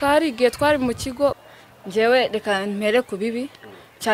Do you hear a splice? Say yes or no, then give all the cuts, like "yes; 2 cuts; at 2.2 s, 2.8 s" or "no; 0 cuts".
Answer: yes; 1 cut; at 1.4 s